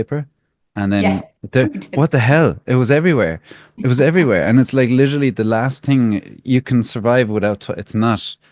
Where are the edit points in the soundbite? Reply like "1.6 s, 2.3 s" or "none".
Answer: none